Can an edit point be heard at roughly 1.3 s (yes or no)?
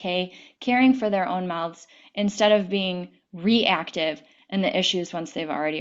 no